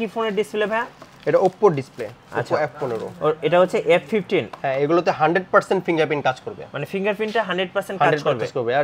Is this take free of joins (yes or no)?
yes